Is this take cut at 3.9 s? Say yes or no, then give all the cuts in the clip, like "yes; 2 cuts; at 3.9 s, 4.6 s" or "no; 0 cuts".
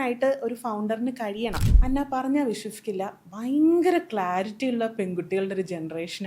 no; 1 cut; at 1.7 s